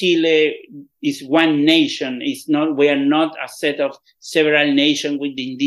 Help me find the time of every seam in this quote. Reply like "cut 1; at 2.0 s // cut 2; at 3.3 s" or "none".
none